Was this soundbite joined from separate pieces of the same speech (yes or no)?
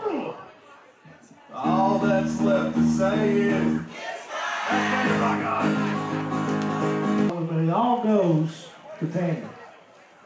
yes